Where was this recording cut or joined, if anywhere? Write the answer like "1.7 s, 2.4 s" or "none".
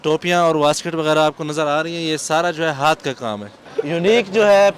3.7 s